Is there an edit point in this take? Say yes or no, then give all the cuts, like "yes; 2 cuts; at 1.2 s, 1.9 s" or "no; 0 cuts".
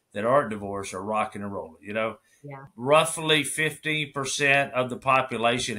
yes; 1 cut; at 2.7 s